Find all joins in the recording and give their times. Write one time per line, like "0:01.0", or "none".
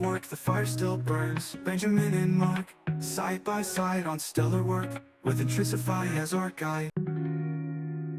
0:06.9

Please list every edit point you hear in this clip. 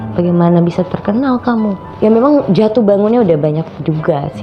0:01.8

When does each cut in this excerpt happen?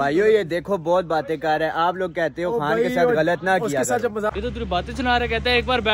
0:04.3

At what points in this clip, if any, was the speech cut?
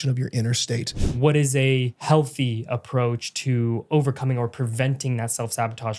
0:01.0
0:01.9

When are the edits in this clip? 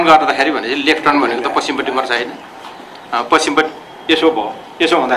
none

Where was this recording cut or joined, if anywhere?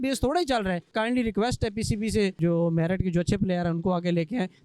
0:00.9
0:02.4

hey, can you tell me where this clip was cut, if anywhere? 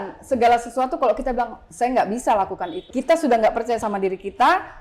0:02.9

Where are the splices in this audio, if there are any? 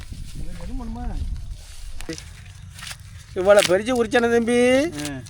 0:02.1

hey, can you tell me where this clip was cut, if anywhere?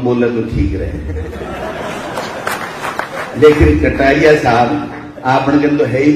none

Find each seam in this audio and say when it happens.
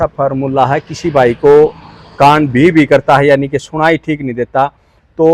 none

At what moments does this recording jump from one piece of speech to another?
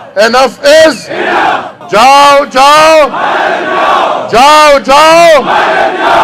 0:01.7

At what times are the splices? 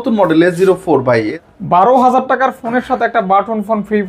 0:01.4

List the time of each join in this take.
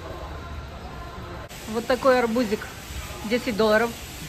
0:01.5

